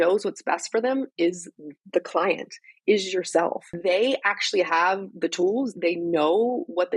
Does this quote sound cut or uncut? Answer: cut